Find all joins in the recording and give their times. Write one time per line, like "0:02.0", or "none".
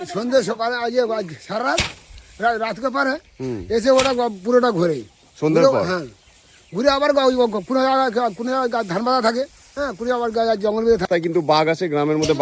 0:11.0